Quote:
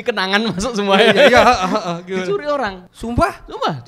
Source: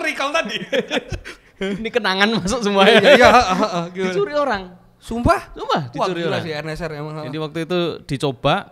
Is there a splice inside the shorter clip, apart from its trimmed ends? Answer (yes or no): yes